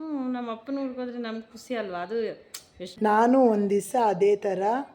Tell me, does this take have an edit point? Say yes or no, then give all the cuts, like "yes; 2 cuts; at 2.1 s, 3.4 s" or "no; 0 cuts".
yes; 1 cut; at 2.8 s